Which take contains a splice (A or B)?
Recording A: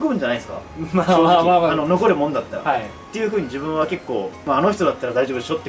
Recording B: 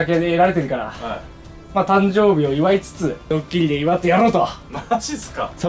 B